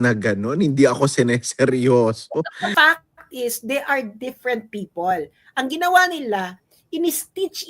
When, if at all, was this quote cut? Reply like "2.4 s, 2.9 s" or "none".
2.6 s